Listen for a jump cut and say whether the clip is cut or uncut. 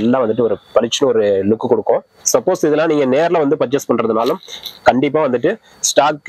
cut